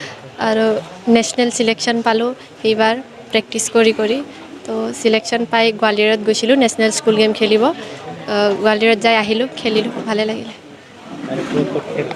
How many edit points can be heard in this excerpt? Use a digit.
0